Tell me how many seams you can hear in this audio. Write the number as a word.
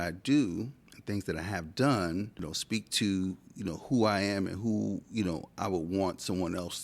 one